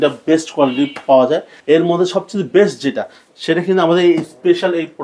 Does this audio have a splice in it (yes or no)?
yes